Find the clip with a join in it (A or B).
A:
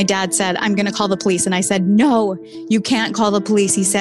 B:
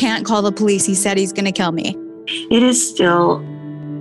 B